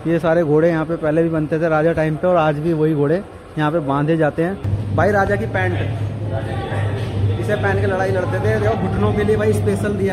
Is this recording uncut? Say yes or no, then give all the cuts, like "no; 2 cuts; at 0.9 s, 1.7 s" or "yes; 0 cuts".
no; 1 cut; at 4.7 s